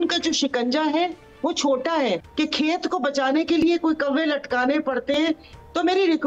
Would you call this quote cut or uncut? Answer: cut